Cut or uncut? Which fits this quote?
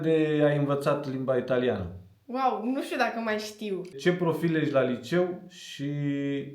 cut